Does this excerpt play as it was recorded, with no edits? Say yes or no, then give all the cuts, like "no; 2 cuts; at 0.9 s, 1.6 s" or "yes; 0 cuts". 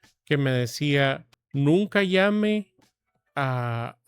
no; 1 cut; at 1.3 s